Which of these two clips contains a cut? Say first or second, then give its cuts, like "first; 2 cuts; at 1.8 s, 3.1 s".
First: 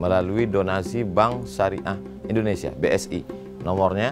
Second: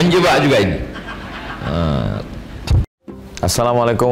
second; 1 cut; at 3.0 s